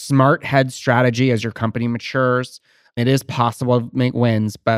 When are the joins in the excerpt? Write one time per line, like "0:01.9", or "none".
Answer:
0:03.0